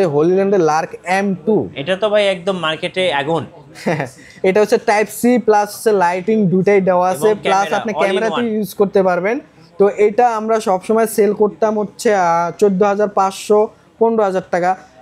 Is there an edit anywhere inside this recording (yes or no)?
no